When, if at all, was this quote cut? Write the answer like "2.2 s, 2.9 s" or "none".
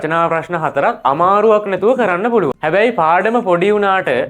2.6 s